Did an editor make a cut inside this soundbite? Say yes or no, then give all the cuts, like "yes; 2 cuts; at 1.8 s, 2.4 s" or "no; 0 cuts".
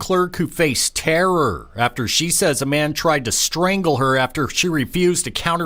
no; 0 cuts